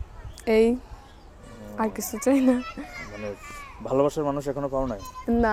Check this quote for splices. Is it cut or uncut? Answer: uncut